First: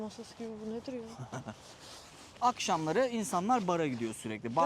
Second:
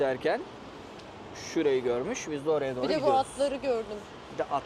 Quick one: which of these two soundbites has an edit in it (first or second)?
first